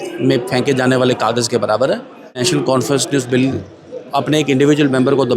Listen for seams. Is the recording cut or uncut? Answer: cut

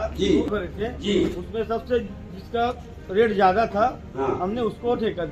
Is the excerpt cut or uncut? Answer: uncut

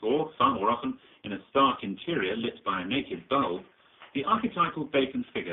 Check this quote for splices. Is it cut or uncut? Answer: uncut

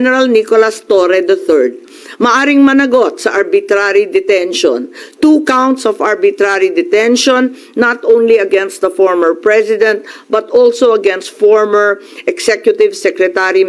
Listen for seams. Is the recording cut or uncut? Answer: uncut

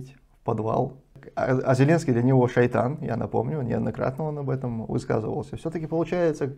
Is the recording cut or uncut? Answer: cut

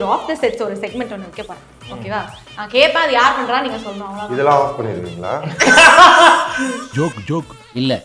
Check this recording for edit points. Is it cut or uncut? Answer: uncut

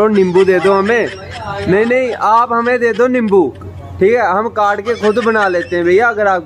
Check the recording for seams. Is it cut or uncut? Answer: uncut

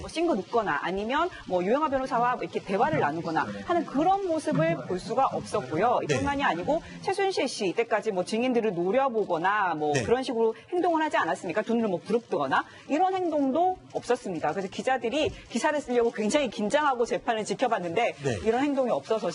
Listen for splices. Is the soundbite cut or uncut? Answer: cut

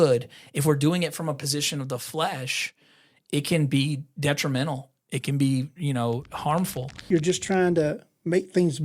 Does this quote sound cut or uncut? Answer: cut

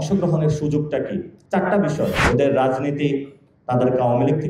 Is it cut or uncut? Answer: cut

